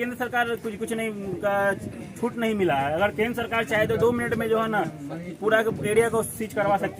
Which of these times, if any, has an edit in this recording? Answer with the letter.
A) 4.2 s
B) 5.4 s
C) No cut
C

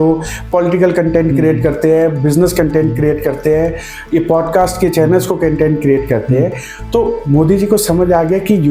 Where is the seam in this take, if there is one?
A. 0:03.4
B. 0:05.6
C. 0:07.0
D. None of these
D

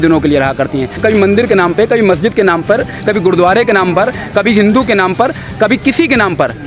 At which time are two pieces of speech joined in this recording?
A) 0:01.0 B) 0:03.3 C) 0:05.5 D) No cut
A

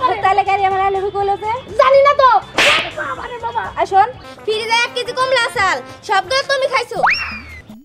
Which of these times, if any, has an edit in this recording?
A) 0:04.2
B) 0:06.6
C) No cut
A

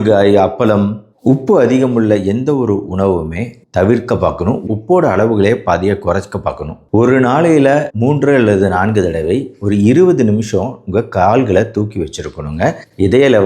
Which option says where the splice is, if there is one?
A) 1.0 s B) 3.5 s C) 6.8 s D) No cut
C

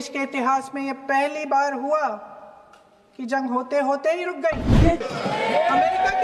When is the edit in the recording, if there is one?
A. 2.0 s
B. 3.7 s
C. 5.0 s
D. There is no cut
C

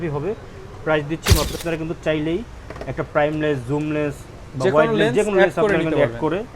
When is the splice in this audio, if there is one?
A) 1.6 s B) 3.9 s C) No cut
A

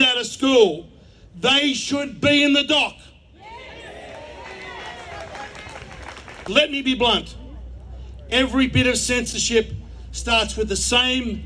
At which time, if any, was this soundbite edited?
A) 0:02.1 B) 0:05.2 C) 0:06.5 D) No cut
C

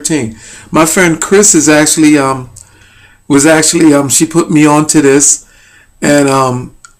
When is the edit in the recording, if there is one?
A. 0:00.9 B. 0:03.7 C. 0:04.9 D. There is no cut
D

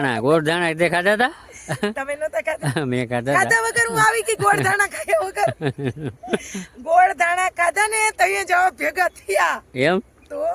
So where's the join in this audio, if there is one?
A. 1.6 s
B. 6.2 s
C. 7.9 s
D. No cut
D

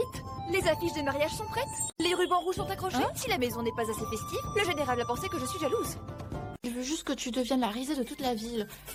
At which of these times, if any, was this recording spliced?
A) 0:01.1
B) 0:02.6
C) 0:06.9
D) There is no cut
D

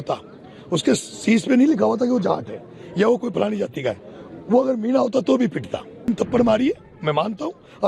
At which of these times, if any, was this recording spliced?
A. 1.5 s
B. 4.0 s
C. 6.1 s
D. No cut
C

